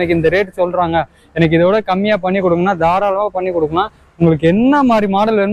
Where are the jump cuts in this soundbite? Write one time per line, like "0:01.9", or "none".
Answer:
none